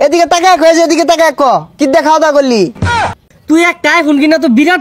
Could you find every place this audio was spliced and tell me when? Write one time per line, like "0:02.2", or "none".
0:02.9